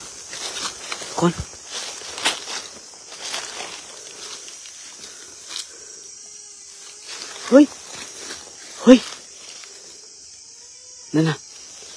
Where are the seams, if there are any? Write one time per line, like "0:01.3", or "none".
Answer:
none